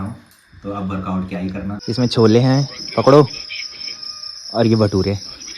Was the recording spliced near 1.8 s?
yes; 1 cut; at 1.8 s

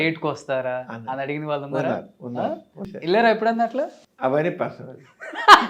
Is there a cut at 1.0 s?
no; 2 cuts; at 2.9 s, 4.0 s

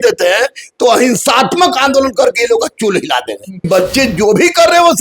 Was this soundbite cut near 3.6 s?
yes; 1 cut; at 3.6 s

